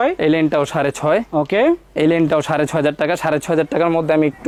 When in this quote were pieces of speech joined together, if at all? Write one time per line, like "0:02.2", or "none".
none

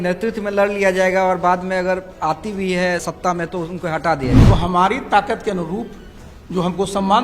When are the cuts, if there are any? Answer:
0:04.4

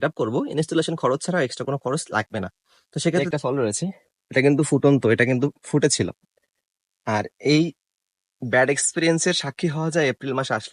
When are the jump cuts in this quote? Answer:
0:03.2

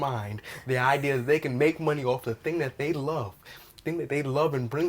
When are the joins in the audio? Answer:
none

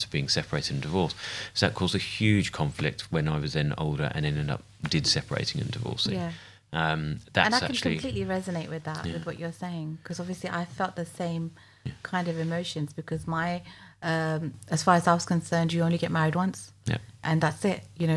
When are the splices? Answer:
none

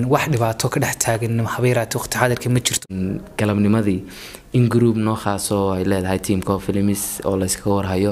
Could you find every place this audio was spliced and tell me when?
0:02.8

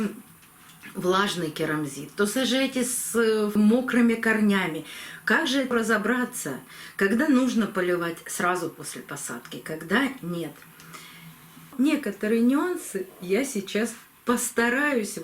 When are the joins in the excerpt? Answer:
0:05.7
0:11.7

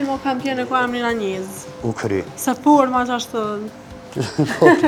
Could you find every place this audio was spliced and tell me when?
none

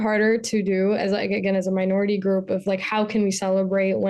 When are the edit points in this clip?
none

